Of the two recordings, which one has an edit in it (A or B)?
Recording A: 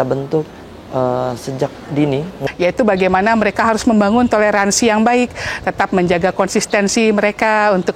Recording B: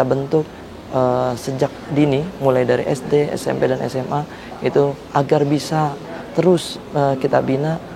A